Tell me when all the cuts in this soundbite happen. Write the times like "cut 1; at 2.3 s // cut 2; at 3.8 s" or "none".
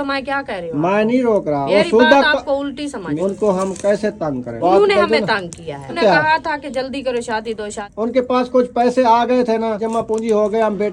cut 1; at 1.7 s // cut 2; at 3.1 s // cut 3; at 4.6 s // cut 4; at 6.0 s // cut 5; at 7.8 s // cut 6; at 9.8 s